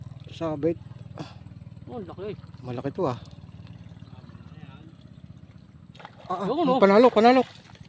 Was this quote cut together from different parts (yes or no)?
no